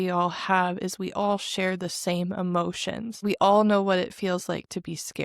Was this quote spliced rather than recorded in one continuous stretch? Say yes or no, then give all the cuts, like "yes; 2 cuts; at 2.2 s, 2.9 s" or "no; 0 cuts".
yes; 1 cut; at 3.2 s